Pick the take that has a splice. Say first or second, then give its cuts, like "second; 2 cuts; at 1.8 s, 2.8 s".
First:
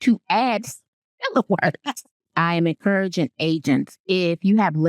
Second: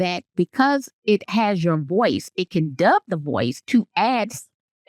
first; 1 cut; at 2.3 s